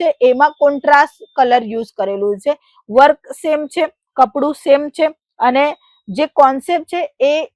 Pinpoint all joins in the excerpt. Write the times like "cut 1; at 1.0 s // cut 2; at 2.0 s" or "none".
none